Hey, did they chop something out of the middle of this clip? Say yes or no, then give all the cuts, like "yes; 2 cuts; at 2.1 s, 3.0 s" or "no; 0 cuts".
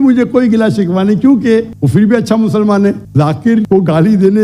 no; 0 cuts